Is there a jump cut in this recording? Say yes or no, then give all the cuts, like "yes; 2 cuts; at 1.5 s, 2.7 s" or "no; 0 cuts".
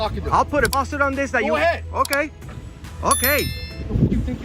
no; 0 cuts